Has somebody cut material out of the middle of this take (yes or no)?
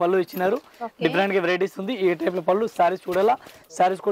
no